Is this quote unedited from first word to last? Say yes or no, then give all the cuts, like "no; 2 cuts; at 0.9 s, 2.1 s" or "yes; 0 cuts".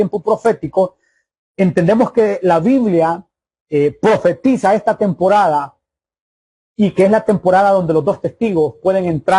yes; 0 cuts